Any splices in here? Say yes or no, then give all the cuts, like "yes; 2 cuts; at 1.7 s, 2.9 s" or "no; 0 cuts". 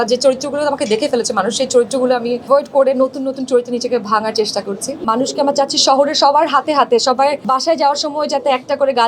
yes; 3 cuts; at 2.5 s, 5.0 s, 7.4 s